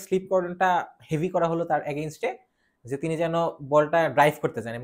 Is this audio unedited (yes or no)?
yes